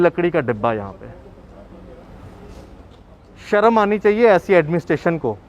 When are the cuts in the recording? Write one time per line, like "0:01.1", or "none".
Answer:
0:03.1